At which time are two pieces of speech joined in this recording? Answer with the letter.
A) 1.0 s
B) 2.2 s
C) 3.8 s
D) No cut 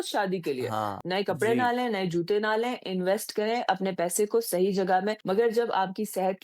A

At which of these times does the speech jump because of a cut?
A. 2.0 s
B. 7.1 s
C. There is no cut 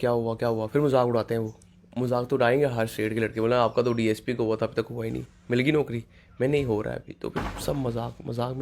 C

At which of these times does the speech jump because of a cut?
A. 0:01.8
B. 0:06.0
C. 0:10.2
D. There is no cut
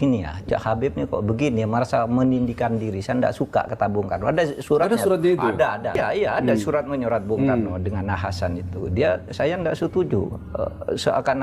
B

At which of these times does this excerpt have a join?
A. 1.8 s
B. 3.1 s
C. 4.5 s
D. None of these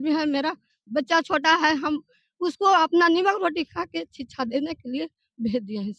D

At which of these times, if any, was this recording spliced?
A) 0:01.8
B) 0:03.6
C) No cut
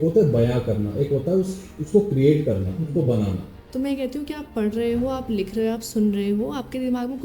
B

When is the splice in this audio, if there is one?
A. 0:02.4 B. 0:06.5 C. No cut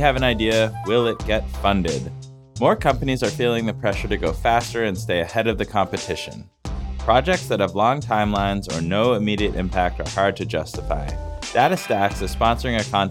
C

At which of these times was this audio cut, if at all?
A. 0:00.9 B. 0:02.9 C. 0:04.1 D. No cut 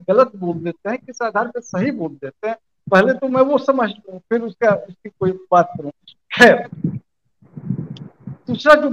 D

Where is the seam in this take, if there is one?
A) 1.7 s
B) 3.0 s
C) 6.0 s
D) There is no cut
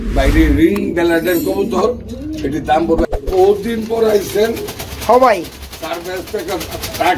B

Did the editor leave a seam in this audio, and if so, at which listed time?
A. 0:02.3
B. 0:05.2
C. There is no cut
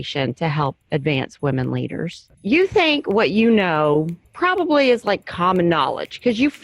A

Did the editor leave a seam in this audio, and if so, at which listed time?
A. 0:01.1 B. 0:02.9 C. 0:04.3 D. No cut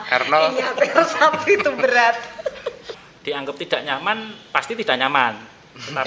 B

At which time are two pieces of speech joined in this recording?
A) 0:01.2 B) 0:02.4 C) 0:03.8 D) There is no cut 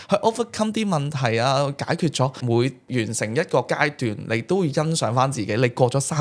B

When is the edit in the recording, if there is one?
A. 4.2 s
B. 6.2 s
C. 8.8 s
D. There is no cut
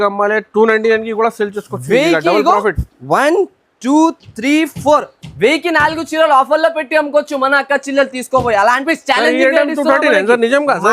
C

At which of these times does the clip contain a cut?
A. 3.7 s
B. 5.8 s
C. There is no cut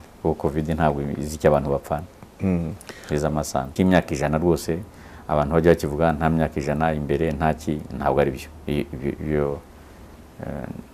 A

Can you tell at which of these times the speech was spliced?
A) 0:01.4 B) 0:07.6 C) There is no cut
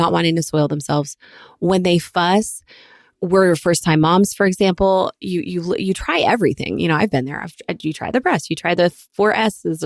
C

